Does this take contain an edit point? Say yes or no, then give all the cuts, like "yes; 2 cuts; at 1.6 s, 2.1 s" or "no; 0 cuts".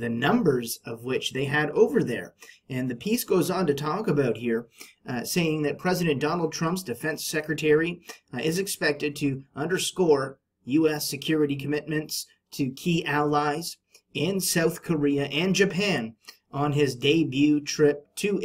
yes; 1 cut; at 11.1 s